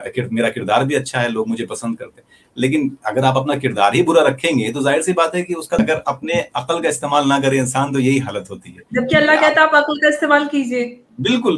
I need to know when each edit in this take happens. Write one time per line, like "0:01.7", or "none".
0:05.8